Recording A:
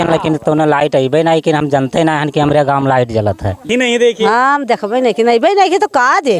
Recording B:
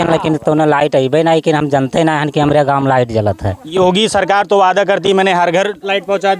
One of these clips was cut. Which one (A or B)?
A